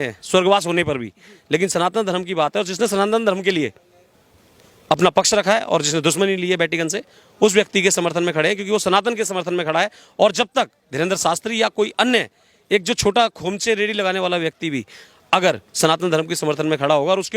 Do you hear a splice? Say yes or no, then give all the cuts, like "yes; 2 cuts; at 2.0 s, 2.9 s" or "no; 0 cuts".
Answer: no; 0 cuts